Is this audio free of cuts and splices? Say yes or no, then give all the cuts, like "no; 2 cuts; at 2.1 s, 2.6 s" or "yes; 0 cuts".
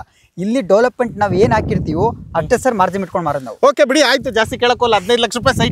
yes; 0 cuts